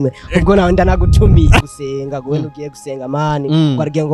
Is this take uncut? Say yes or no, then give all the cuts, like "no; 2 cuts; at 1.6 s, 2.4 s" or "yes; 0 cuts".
no; 1 cut; at 1.6 s